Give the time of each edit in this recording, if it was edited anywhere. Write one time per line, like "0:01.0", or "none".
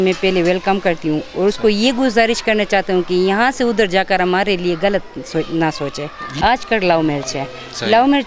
0:06.3